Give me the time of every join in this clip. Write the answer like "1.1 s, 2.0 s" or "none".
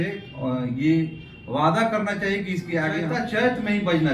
3.1 s